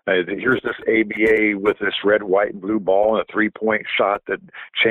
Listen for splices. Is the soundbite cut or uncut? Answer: uncut